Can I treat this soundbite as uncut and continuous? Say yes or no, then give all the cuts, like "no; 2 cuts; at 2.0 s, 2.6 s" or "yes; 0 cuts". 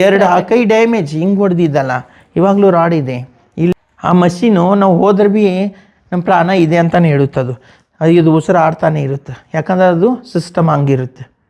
no; 1 cut; at 3.7 s